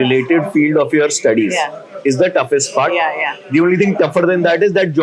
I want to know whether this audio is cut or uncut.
uncut